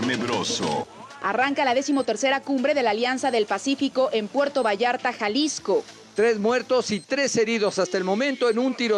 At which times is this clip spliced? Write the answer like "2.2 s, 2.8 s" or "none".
1.0 s, 6.0 s